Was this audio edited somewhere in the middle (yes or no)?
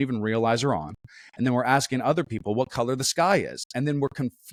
no